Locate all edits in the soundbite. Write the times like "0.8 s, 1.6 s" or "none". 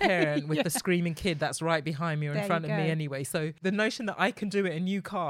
3.6 s